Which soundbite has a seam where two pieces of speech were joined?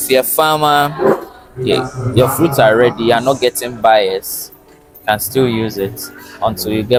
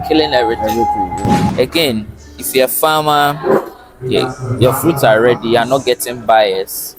second; 1 cut; at 1.5 s

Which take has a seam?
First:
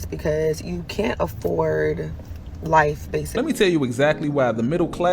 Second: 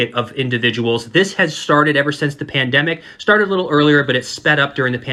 first; 1 cut; at 3.3 s

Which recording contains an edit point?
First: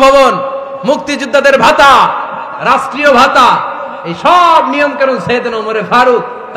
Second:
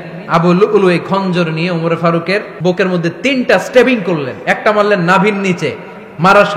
second; 1 cut; at 2.5 s

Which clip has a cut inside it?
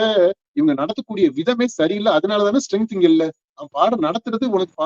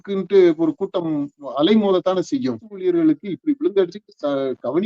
second; 1 cut; at 2.7 s

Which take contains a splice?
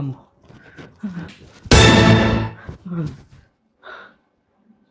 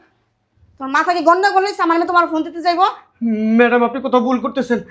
first; 2 cuts; at 1.4 s, 2.7 s

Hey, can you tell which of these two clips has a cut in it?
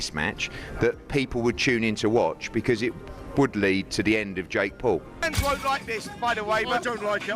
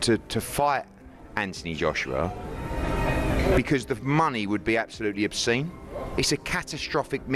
first; 1 cut; at 5.2 s

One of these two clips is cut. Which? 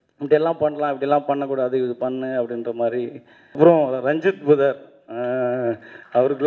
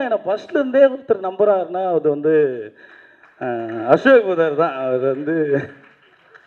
first; 1 cut; at 3.6 s

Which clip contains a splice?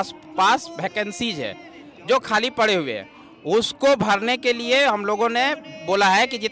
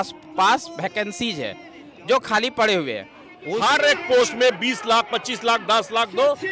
second; 1 cut; at 3.4 s

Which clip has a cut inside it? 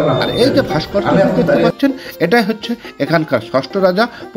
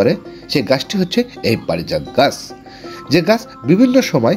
first; 1 cut; at 1.7 s

